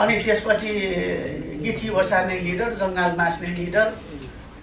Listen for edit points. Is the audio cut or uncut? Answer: uncut